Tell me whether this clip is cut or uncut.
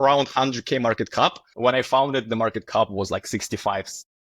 cut